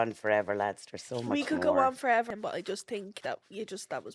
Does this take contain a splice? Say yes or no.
yes